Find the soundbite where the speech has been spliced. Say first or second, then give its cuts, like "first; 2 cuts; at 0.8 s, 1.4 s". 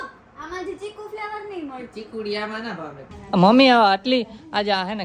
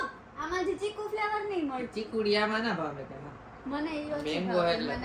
first; 1 cut; at 3.1 s